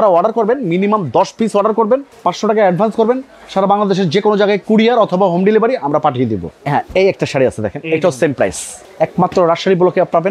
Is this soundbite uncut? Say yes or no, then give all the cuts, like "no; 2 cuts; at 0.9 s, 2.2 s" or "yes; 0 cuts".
no; 3 cuts; at 2.1 s, 6.5 s, 8.8 s